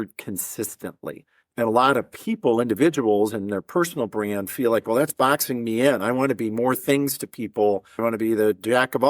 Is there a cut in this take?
yes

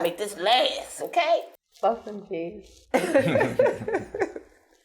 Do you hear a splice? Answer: yes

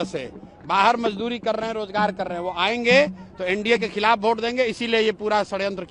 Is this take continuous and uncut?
yes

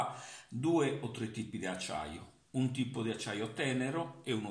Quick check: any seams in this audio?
no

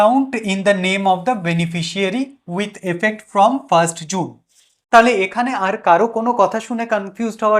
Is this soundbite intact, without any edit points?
yes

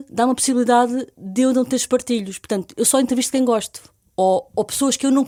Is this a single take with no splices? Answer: yes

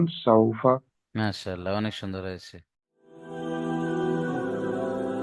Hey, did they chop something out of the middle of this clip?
yes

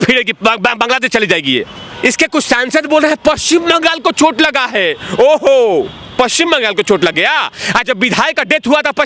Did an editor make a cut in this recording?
yes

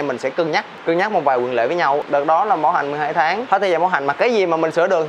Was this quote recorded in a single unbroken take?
no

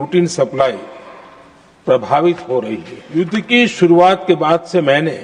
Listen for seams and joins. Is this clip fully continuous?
no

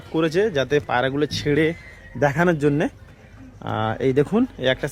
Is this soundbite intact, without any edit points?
yes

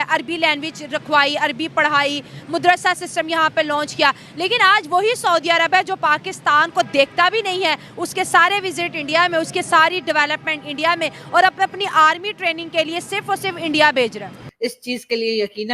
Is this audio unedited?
no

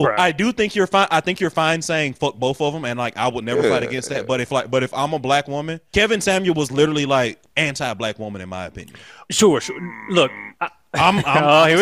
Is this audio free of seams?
no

